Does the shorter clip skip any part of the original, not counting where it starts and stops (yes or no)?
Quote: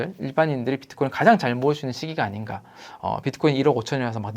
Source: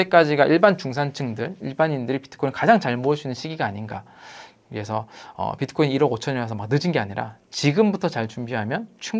yes